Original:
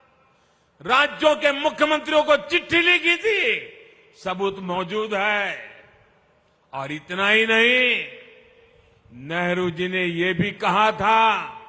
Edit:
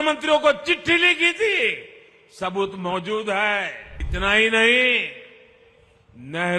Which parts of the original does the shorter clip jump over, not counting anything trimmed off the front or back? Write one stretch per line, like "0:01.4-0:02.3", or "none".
0:05.9-0:07.0